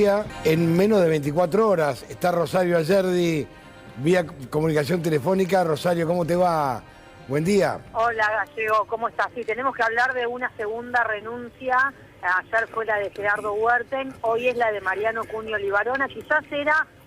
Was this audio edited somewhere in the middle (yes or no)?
no